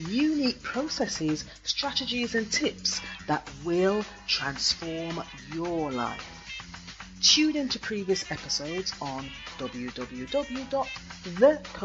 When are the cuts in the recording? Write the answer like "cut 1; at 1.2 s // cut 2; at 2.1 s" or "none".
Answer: none